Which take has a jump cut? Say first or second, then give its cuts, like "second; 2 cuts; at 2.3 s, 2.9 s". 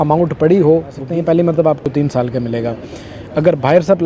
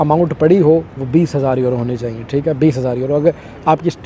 first; 2 cuts; at 1.0 s, 1.8 s